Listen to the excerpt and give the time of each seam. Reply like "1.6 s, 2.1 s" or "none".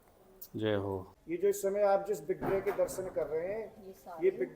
1.1 s